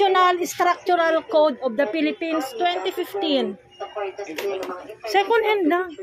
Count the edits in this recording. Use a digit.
0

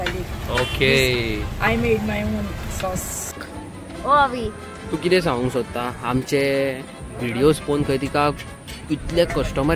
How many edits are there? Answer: 0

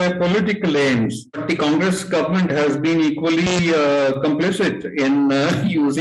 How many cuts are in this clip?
1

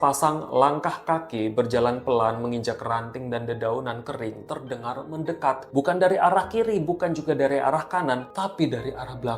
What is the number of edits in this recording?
2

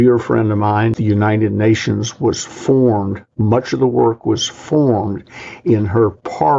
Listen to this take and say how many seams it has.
1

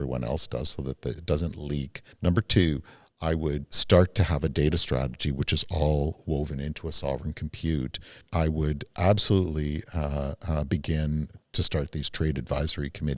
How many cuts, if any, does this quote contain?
3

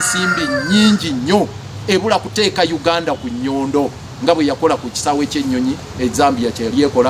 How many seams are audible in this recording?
0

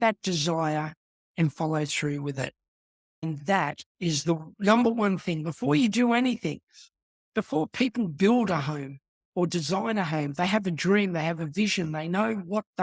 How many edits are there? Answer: 1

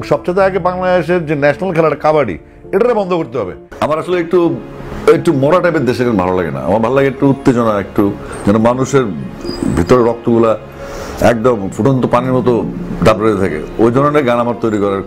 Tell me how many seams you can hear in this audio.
1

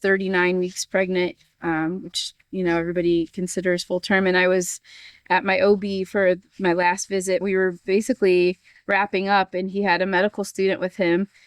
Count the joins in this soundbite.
1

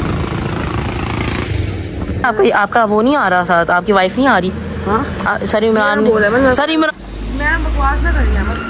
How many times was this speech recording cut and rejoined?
1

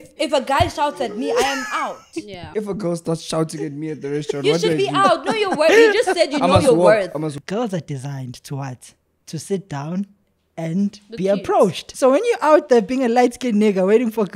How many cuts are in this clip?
3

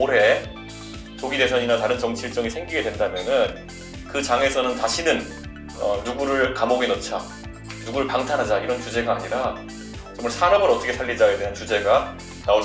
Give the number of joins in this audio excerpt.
0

